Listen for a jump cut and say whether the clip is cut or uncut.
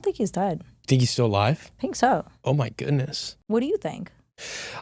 uncut